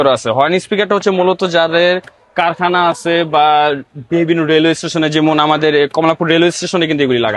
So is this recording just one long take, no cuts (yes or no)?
yes